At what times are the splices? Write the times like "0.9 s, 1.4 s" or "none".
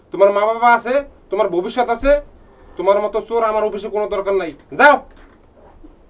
none